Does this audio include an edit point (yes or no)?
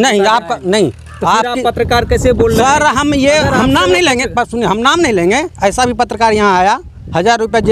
no